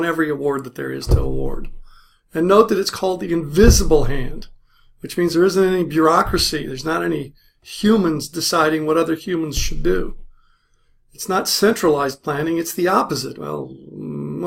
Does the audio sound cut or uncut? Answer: cut